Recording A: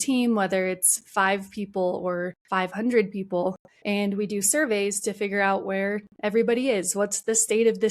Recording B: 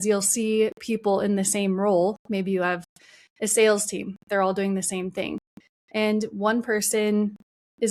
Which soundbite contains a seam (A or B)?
A